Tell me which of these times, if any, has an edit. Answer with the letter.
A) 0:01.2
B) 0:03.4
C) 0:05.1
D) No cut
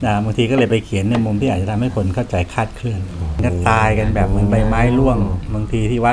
B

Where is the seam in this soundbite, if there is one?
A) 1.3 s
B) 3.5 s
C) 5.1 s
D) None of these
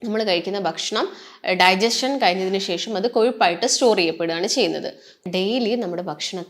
C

